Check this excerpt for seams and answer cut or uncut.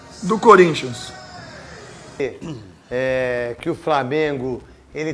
cut